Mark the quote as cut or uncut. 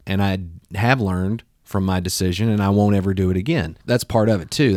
uncut